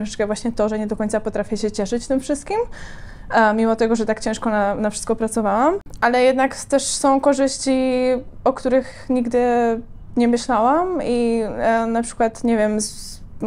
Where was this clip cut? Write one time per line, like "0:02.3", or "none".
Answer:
none